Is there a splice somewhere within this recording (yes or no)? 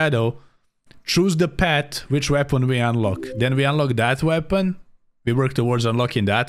no